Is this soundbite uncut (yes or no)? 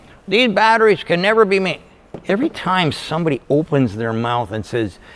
yes